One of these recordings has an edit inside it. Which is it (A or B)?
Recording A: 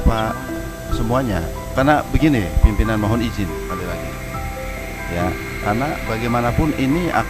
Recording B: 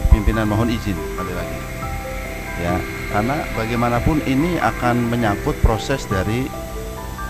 A